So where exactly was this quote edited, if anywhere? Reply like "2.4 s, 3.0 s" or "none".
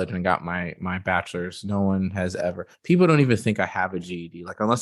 none